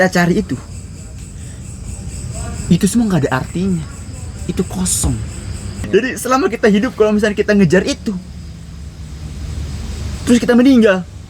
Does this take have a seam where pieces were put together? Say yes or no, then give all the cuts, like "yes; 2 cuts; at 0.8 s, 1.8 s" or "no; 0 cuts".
yes; 1 cut; at 5.7 s